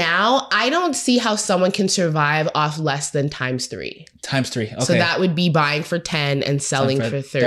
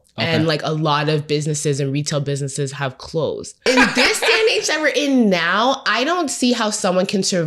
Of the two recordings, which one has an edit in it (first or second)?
second